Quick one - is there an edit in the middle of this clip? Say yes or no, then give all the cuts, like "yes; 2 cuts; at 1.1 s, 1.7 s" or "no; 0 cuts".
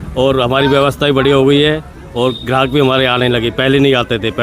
no; 0 cuts